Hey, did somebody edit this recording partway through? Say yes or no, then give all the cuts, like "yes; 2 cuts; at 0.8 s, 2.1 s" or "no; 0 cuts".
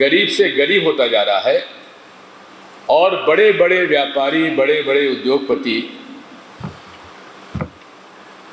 no; 0 cuts